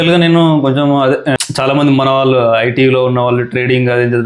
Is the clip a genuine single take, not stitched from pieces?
no; 1 cut; at 1.4 s

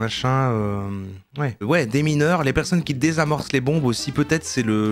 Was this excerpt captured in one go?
no; 1 cut; at 1.6 s

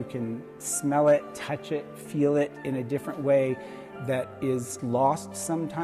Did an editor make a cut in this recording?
no; 0 cuts

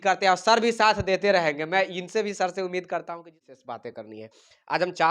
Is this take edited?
yes; 1 cut; at 3.4 s

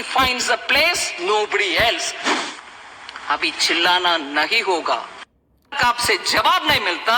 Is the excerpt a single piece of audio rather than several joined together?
no; 2 cuts; at 2.2 s, 5.8 s

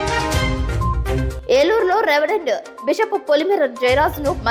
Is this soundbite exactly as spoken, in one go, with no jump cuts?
yes; 0 cuts

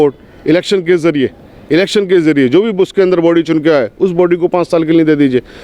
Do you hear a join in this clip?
no; 0 cuts

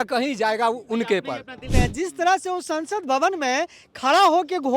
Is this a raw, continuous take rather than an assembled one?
no; 1 cut; at 1.7 s

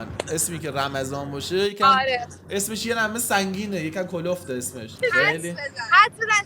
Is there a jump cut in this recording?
yes; 1 cut; at 4.8 s

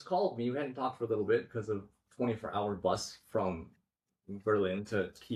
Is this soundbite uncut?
yes; 0 cuts

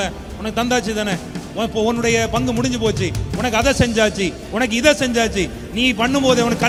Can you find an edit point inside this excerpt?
no; 0 cuts

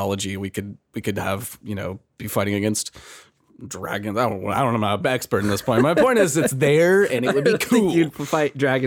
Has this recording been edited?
no; 0 cuts

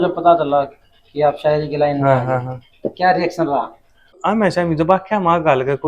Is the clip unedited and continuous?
no; 1 cut; at 4.2 s

